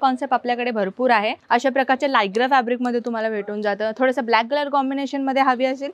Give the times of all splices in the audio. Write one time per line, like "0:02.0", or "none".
0:01.4